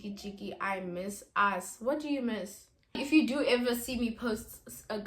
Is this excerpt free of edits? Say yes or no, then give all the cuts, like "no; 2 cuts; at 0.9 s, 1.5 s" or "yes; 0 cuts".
no; 1 cut; at 2.9 s